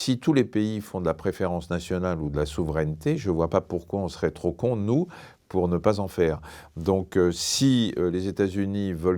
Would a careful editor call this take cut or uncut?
uncut